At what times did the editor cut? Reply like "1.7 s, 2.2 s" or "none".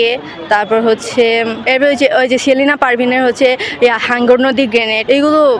none